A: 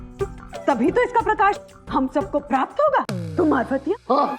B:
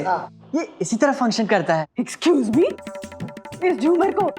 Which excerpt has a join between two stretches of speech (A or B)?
A